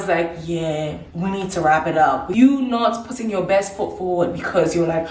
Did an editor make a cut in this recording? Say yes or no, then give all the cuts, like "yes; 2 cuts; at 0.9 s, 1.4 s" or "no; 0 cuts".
yes; 2 cuts; at 1.0 s, 2.3 s